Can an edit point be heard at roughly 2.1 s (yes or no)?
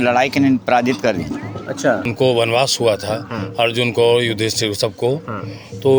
yes